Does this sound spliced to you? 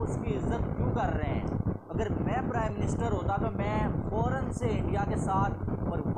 no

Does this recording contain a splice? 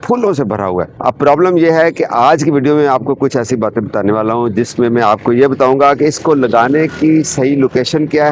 no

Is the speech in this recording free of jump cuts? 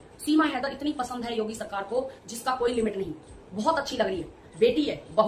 yes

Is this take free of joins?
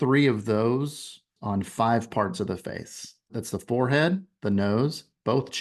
no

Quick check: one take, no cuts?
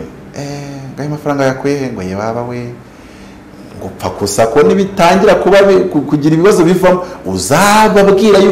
yes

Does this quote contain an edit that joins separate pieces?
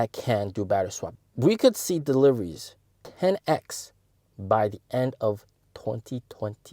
yes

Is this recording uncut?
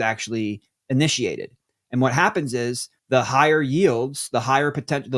no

